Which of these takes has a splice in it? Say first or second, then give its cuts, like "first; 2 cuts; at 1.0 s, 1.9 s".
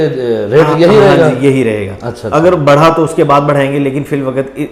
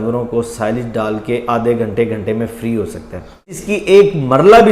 second; 1 cut; at 3.5 s